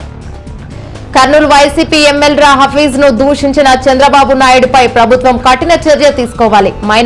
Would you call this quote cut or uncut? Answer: cut